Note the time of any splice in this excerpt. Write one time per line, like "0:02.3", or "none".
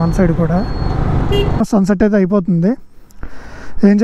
0:01.6